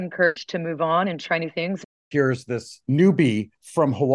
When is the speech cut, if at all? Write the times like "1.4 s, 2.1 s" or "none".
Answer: 1.9 s, 2.7 s